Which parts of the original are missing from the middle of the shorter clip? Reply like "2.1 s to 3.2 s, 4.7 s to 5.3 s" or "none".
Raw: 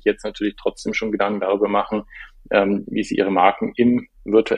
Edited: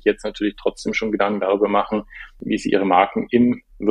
2.4 s to 2.9 s